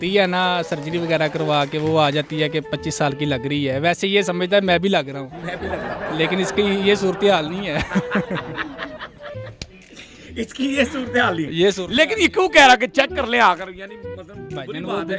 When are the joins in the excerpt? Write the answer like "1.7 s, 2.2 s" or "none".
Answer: none